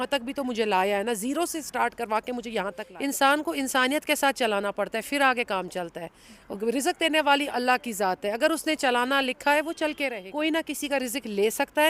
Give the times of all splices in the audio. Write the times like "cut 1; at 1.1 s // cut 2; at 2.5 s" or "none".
cut 1; at 2.8 s // cut 2; at 10.2 s